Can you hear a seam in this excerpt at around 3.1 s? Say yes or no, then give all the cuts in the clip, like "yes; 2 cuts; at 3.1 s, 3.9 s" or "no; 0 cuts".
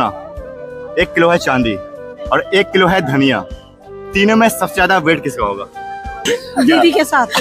no; 1 cut; at 6.2 s